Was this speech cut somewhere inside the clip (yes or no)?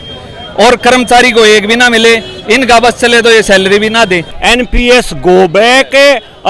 yes